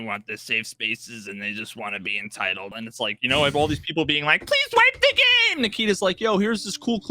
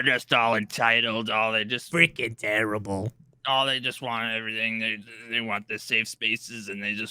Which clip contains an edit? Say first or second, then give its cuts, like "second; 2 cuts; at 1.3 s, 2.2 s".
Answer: first; 1 cut; at 2.7 s